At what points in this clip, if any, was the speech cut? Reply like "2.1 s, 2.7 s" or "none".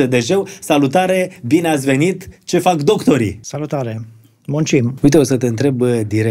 3.4 s, 4.9 s